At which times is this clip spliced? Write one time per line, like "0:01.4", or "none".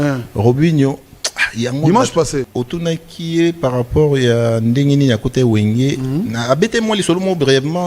0:02.5